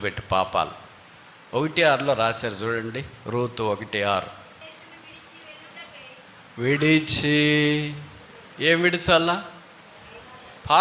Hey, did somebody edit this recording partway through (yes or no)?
yes